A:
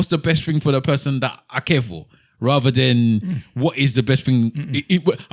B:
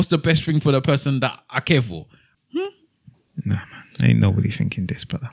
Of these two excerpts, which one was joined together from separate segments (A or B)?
B